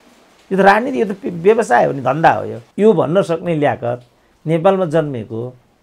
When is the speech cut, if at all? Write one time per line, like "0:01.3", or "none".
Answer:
none